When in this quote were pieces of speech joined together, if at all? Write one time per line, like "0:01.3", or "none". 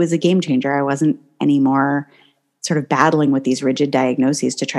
none